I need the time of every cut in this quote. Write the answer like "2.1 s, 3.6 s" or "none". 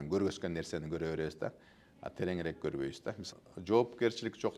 3.3 s